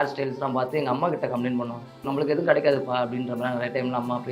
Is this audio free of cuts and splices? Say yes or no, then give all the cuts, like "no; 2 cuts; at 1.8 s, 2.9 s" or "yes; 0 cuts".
no; 1 cut; at 2.0 s